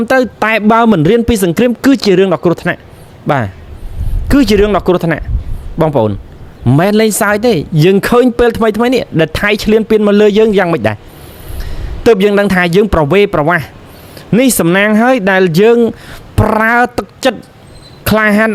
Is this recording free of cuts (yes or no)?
yes